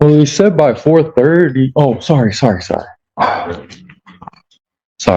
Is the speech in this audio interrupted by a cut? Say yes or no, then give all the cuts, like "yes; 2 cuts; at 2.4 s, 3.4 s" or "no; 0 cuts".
no; 0 cuts